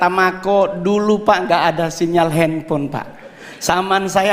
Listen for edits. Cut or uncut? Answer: uncut